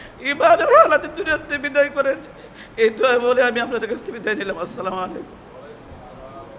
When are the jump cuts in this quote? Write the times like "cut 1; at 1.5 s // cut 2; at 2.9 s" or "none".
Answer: none